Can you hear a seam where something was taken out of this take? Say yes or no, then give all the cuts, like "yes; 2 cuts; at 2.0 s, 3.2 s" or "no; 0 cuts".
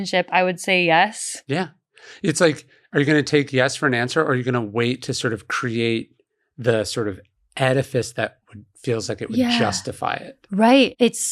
no; 0 cuts